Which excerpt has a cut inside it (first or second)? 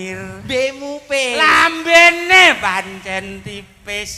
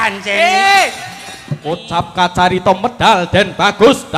second